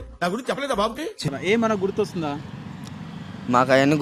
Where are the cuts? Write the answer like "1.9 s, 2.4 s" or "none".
1.3 s